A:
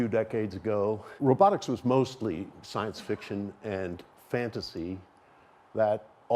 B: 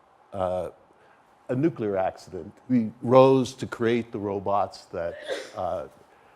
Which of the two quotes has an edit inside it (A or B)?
B